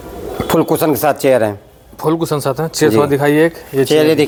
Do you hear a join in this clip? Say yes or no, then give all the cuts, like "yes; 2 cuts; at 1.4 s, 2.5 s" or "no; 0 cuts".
no; 0 cuts